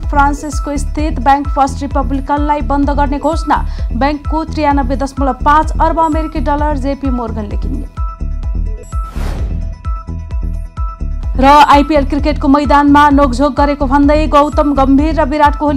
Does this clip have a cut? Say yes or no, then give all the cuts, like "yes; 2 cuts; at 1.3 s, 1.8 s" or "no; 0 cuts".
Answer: no; 0 cuts